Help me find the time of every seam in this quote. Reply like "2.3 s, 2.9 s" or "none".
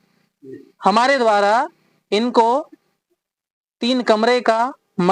none